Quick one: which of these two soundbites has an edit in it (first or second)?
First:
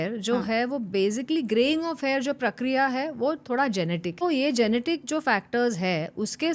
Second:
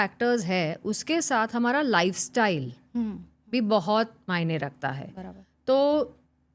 first